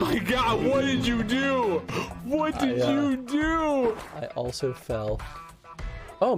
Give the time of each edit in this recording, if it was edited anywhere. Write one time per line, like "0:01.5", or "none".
none